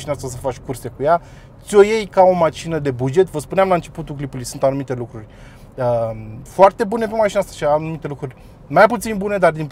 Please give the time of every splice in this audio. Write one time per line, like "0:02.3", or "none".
none